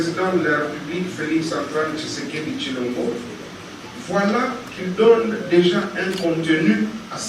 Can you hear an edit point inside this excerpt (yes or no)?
no